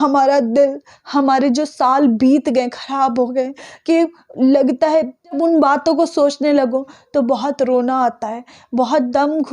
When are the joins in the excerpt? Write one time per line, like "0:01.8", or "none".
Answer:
0:05.2

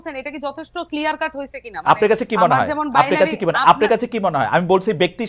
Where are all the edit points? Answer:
none

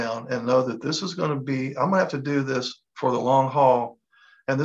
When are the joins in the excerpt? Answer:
none

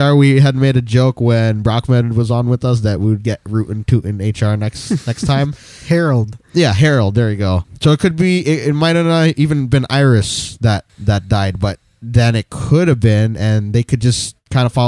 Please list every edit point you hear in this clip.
0:07.7

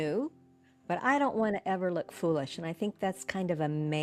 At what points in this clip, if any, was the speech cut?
none

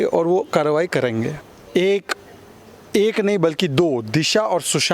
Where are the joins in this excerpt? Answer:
0:01.4

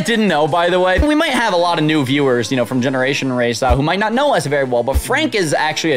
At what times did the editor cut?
0:01.0

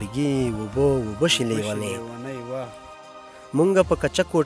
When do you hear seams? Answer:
0:03.1

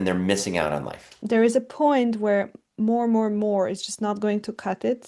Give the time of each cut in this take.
0:01.1

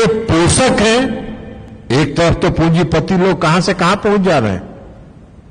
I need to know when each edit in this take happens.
none

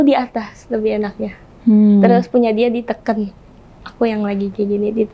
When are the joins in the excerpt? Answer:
none

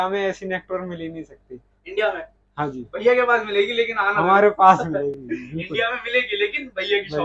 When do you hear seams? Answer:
none

